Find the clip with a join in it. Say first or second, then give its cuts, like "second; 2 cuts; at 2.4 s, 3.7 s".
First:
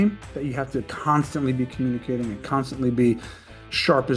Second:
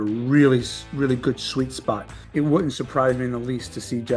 second; 1 cut; at 2.1 s